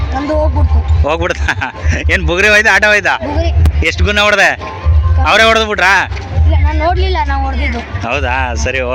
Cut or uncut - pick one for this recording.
uncut